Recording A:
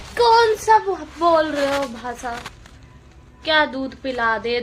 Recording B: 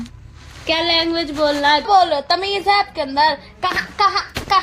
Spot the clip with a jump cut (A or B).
B